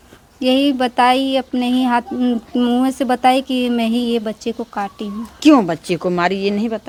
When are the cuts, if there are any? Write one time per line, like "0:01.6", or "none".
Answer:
none